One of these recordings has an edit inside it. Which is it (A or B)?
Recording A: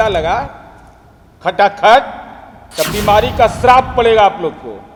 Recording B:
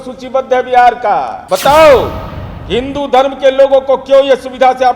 B